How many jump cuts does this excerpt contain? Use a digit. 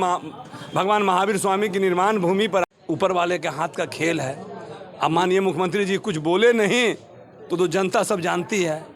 1